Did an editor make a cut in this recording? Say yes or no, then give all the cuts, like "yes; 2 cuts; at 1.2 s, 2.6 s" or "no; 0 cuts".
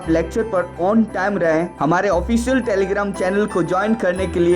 yes; 1 cut; at 1.5 s